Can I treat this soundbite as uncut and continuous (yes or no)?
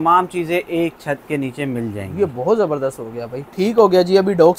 yes